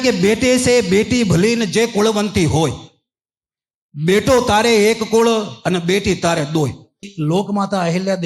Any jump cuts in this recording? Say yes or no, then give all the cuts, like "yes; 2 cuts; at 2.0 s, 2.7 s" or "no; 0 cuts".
yes; 1 cut; at 7.1 s